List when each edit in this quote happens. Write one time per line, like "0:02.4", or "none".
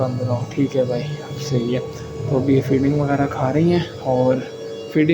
none